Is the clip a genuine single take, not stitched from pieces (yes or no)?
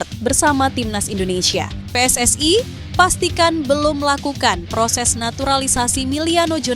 no